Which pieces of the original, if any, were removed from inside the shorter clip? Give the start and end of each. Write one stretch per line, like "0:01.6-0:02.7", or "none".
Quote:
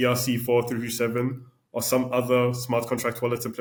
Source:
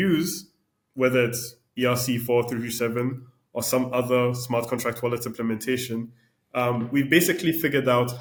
none